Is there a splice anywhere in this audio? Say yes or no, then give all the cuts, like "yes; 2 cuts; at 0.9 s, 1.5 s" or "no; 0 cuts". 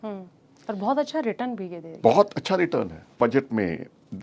yes; 1 cut; at 3.2 s